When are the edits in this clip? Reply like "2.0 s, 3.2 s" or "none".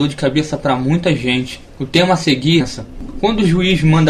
none

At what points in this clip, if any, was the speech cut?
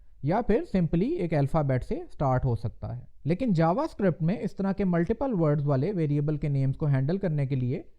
3.1 s

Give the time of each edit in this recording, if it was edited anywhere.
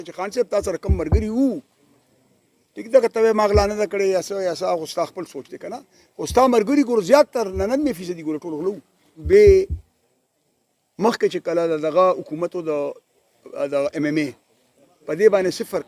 9.1 s

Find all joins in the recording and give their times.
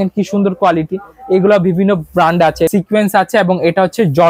2.7 s

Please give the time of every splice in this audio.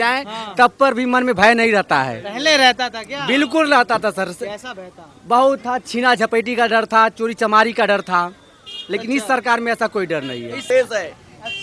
10.7 s

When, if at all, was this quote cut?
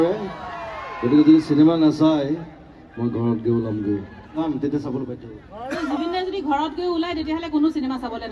4.5 s

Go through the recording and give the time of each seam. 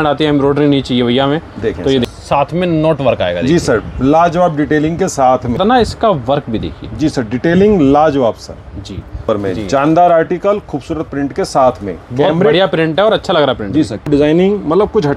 2.1 s, 5.6 s, 9.2 s, 14.1 s

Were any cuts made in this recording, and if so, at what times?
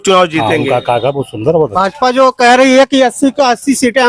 1.7 s

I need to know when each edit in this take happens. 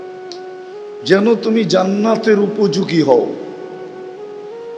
0.9 s

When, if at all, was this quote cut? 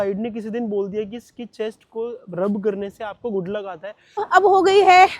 4.2 s

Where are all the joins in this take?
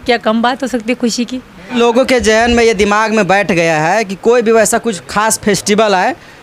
1.8 s

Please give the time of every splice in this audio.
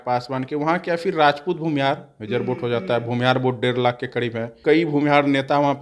4.5 s

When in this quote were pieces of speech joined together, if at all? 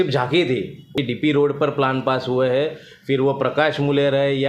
0.9 s

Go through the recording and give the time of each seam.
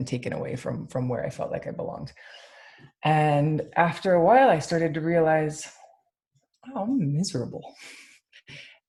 none

